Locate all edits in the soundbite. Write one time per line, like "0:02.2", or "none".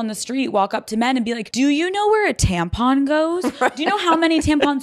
0:01.5